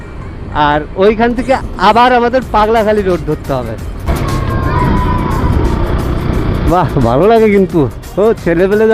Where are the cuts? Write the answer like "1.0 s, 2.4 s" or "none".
4.1 s